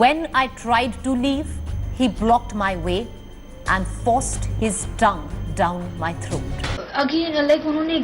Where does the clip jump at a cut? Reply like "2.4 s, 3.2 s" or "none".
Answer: 6.8 s